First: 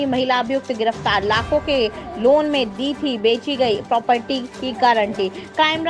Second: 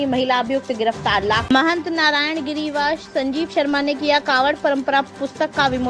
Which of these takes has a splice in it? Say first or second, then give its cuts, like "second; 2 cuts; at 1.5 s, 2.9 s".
second; 1 cut; at 1.4 s